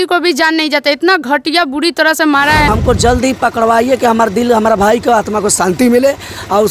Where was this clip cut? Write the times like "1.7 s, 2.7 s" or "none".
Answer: 2.7 s

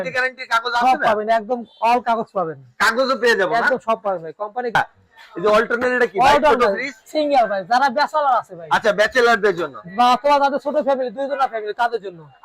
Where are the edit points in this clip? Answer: 4.8 s

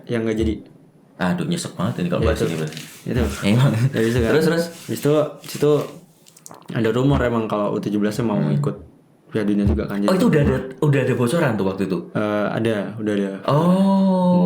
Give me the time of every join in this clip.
none

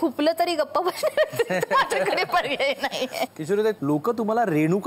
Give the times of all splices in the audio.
3.8 s

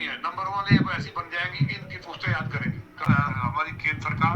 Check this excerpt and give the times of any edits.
3.1 s

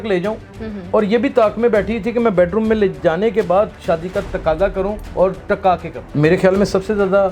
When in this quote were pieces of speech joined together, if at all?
5.0 s, 6.0 s

